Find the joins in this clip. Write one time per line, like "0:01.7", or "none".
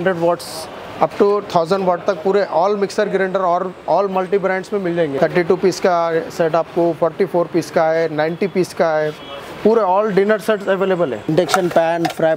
0:05.1
0:11.2

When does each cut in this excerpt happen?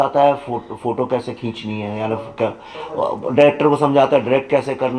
none

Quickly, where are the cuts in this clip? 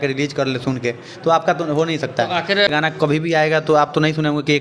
0:02.7

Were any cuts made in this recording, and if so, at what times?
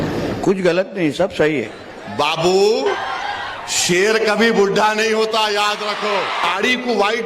0:01.8
0:03.1
0:06.4

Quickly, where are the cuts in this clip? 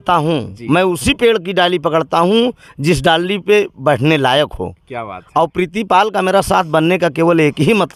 none

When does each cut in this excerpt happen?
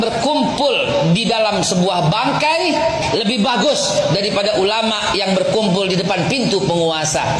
none

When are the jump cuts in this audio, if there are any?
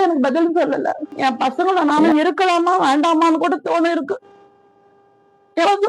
0:01.2

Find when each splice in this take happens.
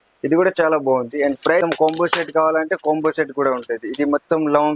0:01.6

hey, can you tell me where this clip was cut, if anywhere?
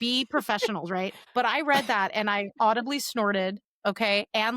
0:01.2

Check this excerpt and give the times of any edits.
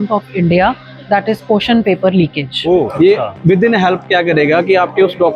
0:02.9

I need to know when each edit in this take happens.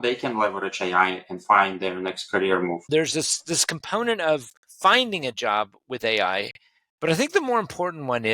0:02.9

